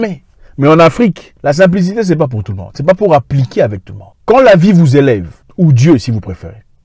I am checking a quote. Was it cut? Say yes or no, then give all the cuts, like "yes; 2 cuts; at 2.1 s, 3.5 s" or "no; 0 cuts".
yes; 1 cut; at 1.3 s